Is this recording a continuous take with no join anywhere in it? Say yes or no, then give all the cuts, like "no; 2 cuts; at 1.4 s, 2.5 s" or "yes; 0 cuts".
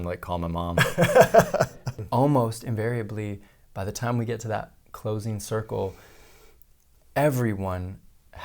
no; 1 cut; at 2.0 s